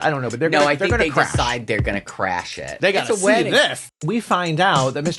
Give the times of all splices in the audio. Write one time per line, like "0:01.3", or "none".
0:02.7
0:03.8